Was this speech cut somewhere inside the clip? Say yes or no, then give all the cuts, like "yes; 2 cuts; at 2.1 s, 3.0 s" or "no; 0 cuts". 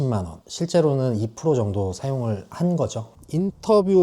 yes; 1 cut; at 3.1 s